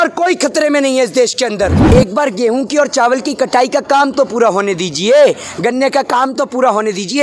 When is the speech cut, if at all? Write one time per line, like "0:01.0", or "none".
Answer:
0:01.8